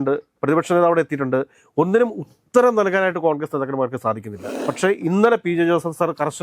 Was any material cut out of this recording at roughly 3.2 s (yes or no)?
no